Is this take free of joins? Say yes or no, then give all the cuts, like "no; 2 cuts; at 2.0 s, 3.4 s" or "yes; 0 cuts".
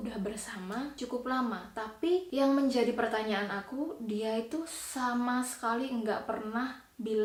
yes; 0 cuts